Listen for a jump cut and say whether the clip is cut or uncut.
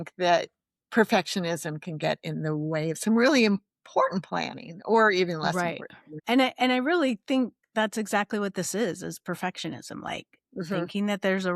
cut